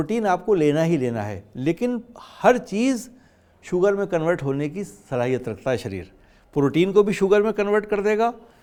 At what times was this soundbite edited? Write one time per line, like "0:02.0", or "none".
none